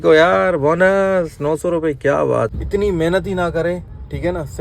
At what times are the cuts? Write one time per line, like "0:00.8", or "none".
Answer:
0:02.6

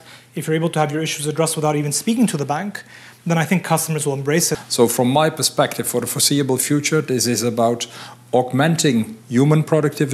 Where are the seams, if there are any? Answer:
0:04.6

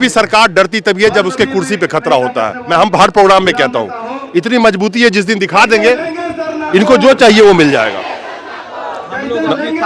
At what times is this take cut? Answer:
none

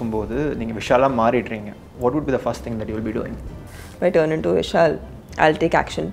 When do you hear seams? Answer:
0:01.9
0:03.7

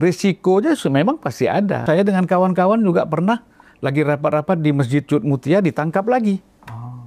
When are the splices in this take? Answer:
0:01.8

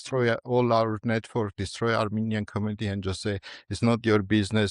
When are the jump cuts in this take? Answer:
none

